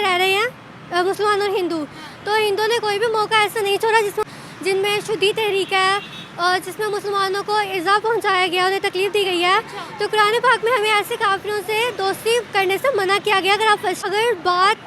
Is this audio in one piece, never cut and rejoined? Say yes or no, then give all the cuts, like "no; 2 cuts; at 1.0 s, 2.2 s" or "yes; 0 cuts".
no; 2 cuts; at 4.2 s, 14.0 s